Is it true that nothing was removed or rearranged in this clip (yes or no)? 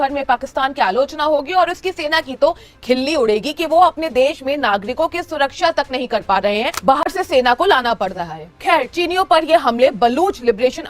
yes